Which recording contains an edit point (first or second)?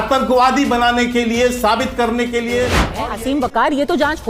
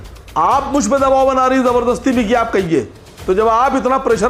first